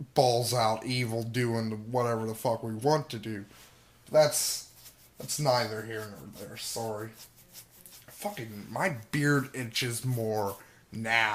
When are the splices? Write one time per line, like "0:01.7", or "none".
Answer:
0:08.4